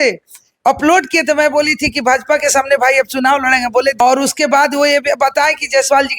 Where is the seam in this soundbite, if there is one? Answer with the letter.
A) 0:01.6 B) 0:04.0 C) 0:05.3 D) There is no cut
B